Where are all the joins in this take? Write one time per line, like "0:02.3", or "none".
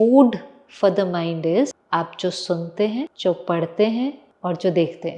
0:01.8
0:03.1
0:04.3